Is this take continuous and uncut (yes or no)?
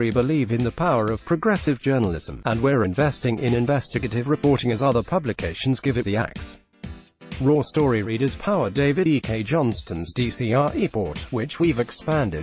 yes